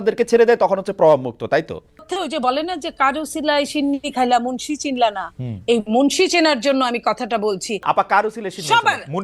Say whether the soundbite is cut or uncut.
cut